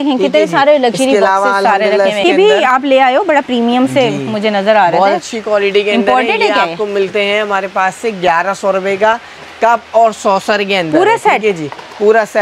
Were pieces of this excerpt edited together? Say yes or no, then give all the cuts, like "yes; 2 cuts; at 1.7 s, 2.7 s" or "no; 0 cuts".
yes; 1 cut; at 2.2 s